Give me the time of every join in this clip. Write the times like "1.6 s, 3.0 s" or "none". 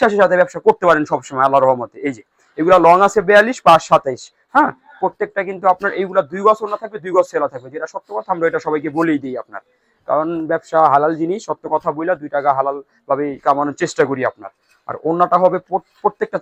none